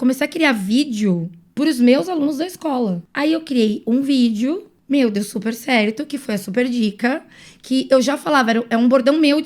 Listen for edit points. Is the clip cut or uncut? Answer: cut